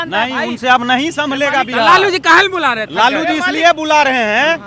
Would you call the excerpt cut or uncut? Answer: uncut